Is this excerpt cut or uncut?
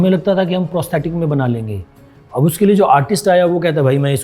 uncut